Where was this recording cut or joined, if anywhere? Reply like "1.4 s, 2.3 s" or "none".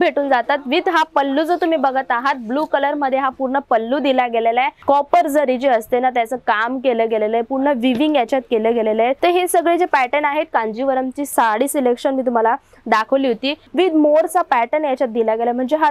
4.8 s, 9.2 s, 11.3 s, 13.6 s